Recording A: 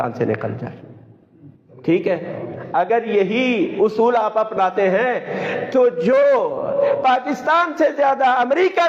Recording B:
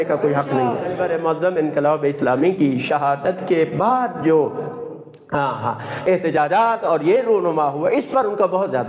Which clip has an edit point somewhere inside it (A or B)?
B